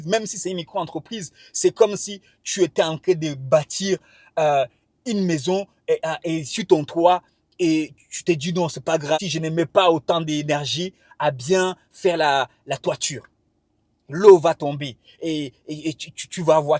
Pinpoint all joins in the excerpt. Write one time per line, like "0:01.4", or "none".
0:09.2